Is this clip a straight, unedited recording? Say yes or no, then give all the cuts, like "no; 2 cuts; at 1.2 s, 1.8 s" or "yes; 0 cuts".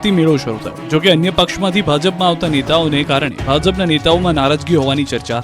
no; 1 cut; at 4.2 s